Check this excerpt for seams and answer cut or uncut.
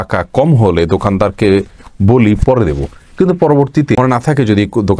cut